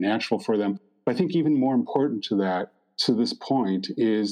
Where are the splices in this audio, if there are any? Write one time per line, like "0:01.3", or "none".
none